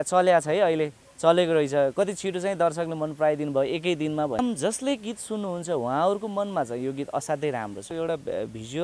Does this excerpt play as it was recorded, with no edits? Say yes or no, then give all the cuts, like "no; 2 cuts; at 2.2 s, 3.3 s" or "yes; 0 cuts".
no; 2 cuts; at 4.4 s, 7.9 s